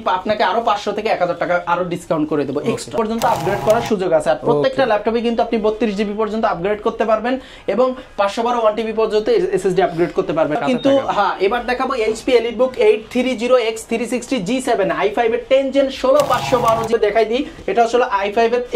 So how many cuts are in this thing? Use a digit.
3